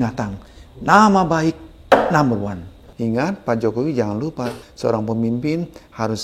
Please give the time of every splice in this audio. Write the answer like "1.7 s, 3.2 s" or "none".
2.8 s, 4.6 s